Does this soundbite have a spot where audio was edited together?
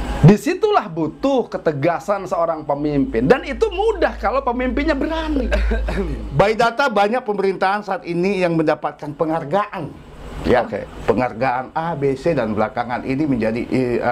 yes; 1 cut; at 5.8 s

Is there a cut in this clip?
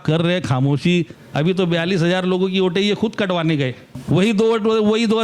yes; 2 cuts; at 1.2 s, 3.9 s

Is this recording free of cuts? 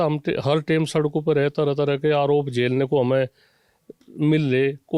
yes; 0 cuts

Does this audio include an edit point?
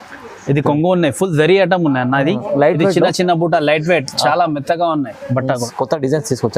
yes; 1 cut; at 5.7 s

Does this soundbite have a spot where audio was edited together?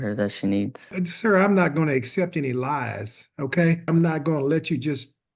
yes; 2 cuts; at 0.9 s, 3.9 s

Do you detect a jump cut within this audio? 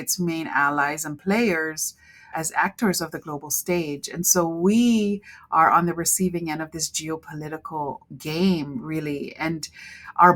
no; 0 cuts

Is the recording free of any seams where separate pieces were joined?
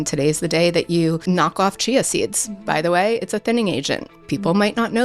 no; 2 cuts; at 1.2 s, 4.1 s

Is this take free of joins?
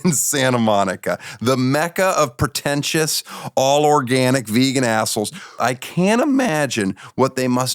no; 1 cut; at 5.6 s

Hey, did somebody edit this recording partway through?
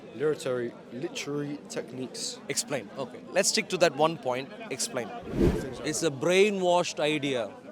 yes; 1 cut; at 5.5 s

